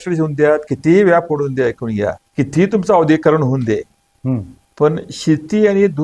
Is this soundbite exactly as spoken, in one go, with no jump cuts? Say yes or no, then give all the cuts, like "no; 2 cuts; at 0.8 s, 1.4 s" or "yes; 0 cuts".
no; 2 cuts; at 2.2 s, 4.6 s